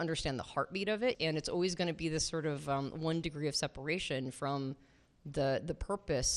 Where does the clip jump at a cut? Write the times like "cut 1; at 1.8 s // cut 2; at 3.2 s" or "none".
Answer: cut 1; at 1.2 s